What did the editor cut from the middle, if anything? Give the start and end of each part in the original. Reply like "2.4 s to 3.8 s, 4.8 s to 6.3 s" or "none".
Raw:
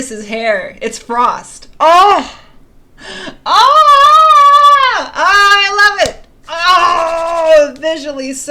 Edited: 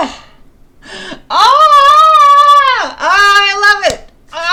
none

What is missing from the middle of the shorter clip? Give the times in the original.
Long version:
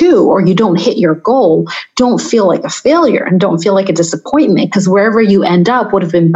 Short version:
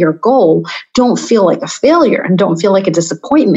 none

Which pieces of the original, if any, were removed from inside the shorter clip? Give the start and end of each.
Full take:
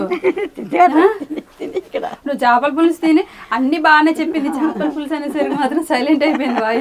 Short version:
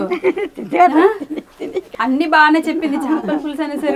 1.9 s to 3.4 s

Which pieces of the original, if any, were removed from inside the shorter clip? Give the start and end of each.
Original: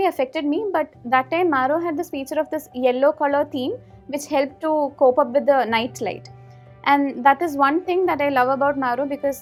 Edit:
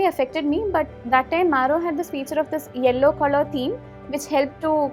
none

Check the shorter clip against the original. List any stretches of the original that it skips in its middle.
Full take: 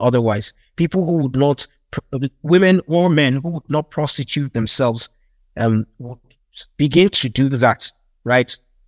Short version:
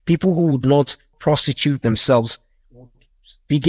1.9 s to 3.9 s, 5.4 s to 6.0 s

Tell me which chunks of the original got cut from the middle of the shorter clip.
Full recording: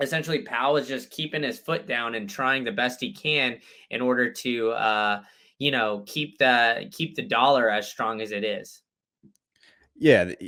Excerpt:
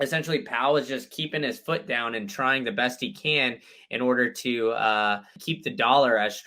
5.4 s to 6.9 s

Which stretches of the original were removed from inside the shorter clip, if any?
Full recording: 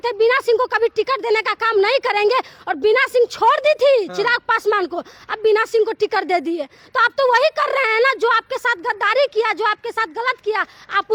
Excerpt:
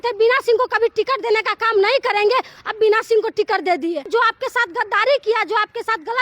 2.6 s to 5.2 s, 6.7 s to 8.2 s

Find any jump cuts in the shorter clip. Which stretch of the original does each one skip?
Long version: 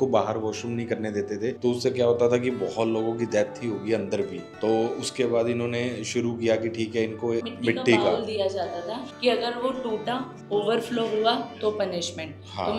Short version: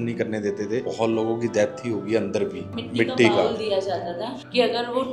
1.6 s to 2.6 s, 4.6 s to 7.5 s

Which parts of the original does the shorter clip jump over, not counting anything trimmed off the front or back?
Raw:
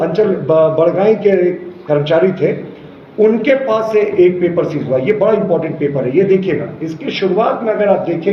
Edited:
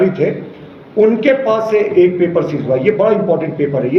none

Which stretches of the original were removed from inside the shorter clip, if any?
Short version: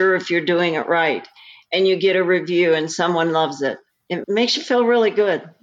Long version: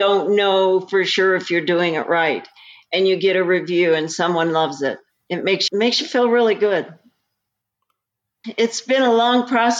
5.4 s to 5.6 s

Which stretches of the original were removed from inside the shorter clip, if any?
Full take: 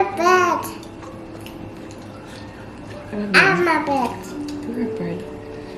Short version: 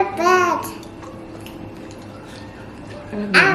none

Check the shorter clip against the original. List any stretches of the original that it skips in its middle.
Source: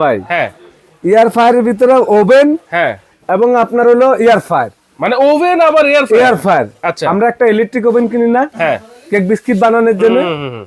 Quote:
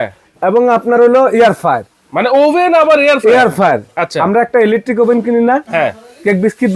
none

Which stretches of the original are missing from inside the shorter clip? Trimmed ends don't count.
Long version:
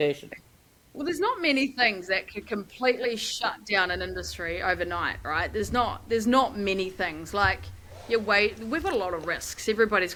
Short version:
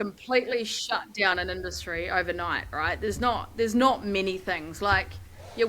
none

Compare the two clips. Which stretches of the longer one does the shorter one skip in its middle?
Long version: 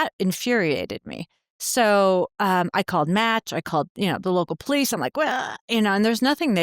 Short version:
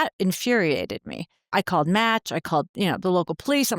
1.5 s to 2.7 s

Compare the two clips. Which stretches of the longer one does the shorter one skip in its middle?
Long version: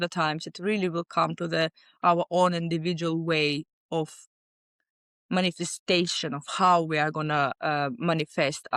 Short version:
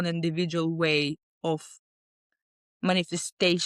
none

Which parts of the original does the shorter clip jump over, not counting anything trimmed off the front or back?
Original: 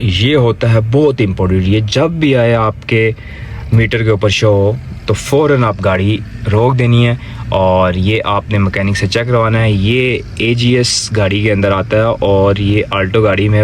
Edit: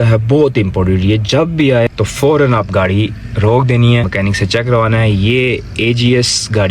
2.5 s to 5.0 s, 7.2 s to 8.7 s

